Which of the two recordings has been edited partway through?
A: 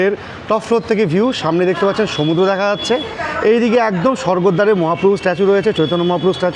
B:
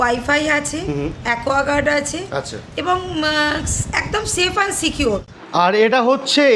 B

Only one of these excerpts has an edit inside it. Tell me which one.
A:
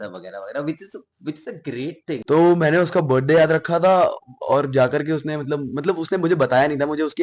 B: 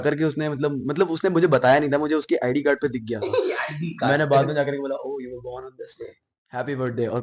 A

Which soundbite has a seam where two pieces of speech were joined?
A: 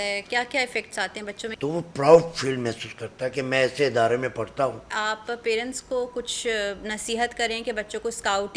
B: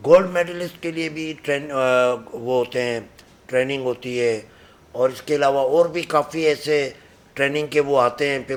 A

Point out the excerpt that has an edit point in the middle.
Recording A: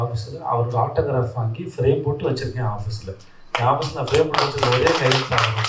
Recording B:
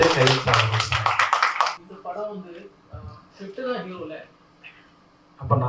B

